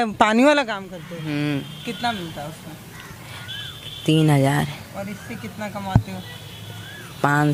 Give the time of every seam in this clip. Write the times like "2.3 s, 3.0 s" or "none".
none